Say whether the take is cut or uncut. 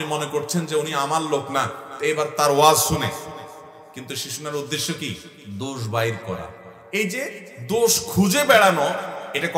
cut